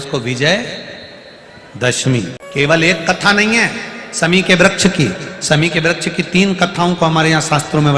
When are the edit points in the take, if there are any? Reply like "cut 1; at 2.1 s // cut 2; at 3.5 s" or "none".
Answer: cut 1; at 2.4 s